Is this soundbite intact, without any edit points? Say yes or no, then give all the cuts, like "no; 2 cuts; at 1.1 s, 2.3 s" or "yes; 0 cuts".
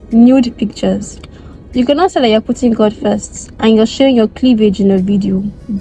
yes; 0 cuts